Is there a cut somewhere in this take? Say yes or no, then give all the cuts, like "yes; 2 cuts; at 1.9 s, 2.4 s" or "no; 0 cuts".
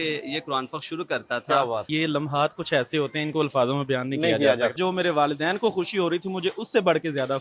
yes; 2 cuts; at 1.9 s, 4.7 s